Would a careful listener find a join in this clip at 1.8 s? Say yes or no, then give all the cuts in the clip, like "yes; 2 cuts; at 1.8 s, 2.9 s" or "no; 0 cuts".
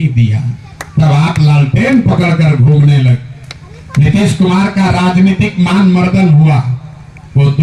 no; 0 cuts